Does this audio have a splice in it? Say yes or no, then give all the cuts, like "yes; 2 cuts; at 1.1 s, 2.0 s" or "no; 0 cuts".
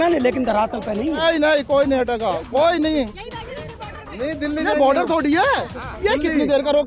yes; 1 cut; at 1.0 s